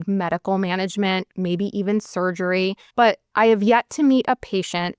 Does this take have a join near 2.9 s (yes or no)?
yes